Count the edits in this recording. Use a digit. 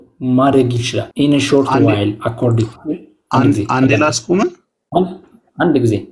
1